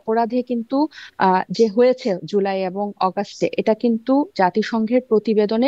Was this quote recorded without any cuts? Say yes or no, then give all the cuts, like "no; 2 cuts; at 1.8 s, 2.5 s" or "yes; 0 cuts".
yes; 0 cuts